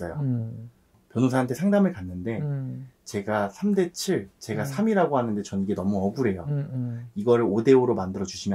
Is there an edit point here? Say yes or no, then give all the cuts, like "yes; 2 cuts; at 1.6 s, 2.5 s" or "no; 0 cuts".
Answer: no; 0 cuts